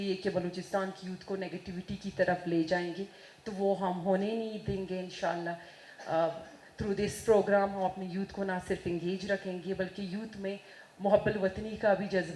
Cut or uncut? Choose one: uncut